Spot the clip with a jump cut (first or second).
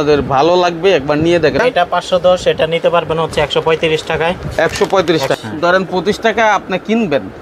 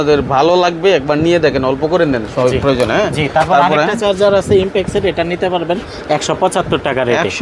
first